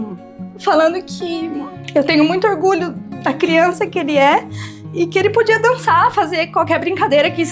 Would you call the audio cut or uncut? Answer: cut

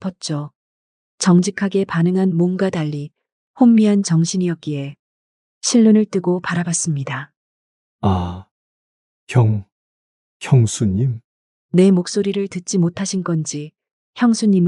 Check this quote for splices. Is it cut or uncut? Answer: uncut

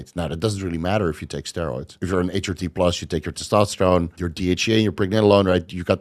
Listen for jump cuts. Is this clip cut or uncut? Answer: cut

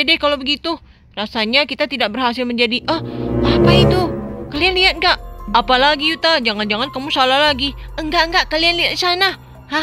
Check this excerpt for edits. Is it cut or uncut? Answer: uncut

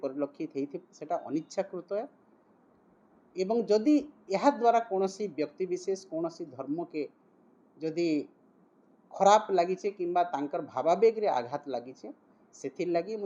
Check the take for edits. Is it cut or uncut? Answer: uncut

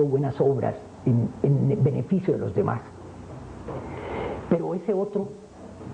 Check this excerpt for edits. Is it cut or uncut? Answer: cut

